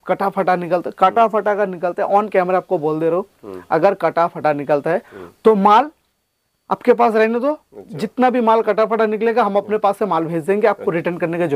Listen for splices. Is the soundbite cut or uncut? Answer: uncut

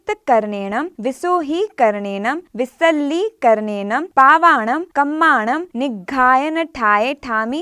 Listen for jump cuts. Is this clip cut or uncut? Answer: cut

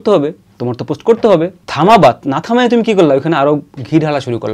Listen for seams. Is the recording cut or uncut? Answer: cut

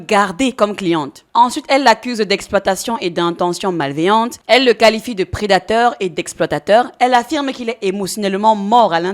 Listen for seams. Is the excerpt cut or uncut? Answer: cut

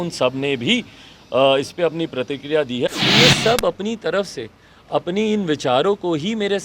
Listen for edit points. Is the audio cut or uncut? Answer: cut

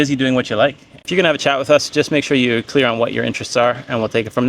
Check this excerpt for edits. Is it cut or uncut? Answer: cut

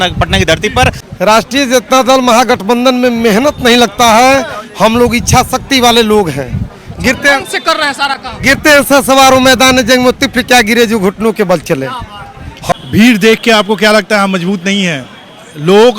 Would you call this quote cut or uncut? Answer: cut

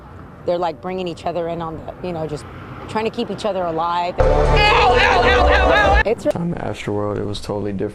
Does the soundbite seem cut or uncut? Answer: cut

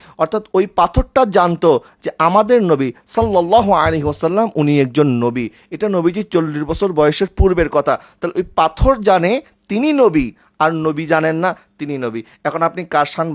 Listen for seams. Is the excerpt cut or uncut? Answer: uncut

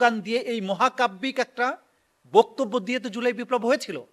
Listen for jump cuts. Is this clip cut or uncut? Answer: uncut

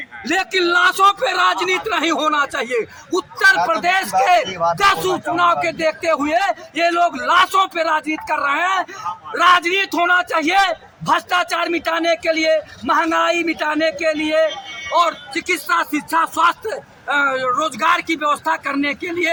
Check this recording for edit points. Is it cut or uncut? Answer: uncut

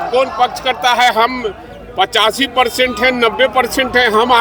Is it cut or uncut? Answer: uncut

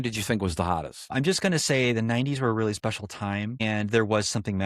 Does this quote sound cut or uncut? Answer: cut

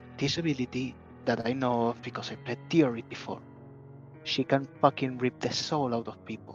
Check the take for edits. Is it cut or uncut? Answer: uncut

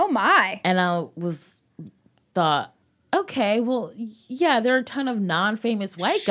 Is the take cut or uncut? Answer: cut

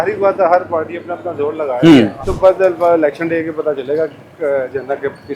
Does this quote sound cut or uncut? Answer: cut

